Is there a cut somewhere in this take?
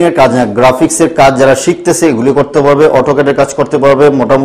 no; 0 cuts

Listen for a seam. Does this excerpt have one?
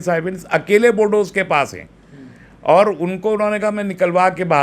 no; 0 cuts

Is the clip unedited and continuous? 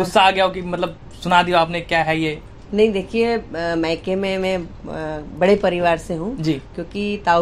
yes; 0 cuts

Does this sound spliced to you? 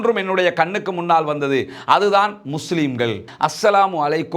yes; 1 cut; at 3.3 s

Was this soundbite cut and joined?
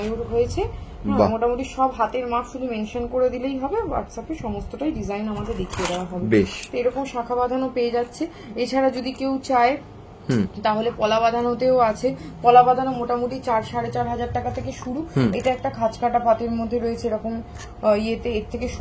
no; 0 cuts

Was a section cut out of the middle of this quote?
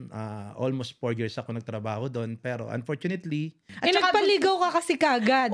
yes; 1 cut; at 3.7 s

